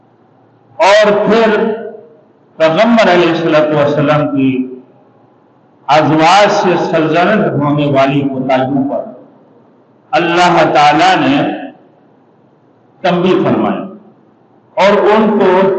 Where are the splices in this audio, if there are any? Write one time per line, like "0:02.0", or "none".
none